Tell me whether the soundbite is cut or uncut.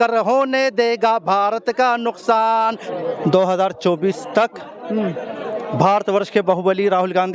cut